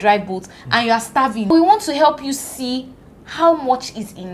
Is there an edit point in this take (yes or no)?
yes